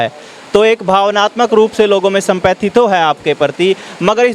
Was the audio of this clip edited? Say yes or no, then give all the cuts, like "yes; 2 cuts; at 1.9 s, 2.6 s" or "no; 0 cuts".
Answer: no; 0 cuts